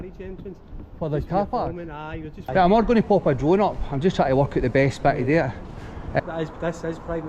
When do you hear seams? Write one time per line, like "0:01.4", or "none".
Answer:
0:02.3
0:06.2